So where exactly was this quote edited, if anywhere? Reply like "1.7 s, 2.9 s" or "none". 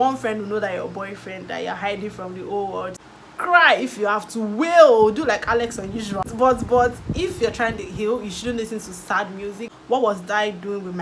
3.0 s, 6.3 s, 9.7 s